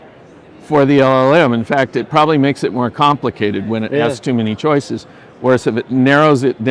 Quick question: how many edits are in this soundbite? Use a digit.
0